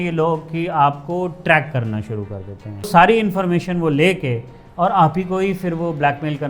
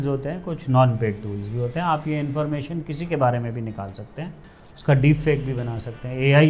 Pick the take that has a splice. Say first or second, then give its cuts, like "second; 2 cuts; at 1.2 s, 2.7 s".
first; 1 cut; at 2.9 s